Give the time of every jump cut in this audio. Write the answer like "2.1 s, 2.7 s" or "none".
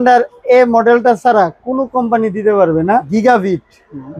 3.1 s